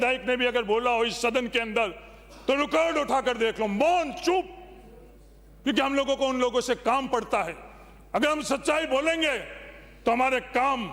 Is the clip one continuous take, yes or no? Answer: yes